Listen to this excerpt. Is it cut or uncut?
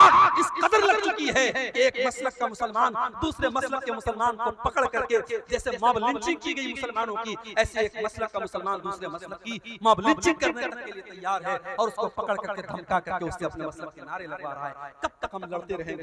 uncut